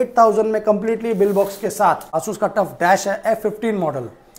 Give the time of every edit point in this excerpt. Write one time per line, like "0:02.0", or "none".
0:02.1